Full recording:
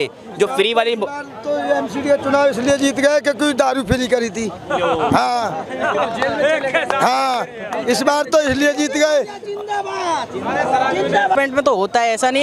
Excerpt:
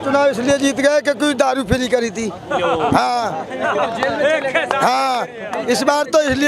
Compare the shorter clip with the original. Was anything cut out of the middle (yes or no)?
no